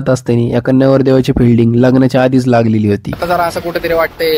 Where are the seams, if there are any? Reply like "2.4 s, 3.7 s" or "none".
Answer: 3.1 s